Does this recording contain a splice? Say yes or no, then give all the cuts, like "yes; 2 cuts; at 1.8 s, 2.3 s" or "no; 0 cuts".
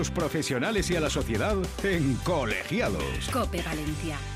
no; 0 cuts